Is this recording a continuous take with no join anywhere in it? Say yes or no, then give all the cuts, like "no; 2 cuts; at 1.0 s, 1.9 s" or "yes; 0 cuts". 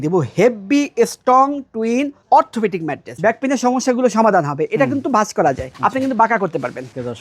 no; 1 cut; at 3.1 s